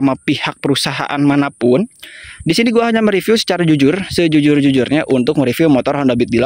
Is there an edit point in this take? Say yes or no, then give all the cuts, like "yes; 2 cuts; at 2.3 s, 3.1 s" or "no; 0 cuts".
no; 0 cuts